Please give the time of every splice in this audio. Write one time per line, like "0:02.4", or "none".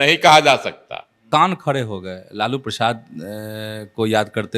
0:01.2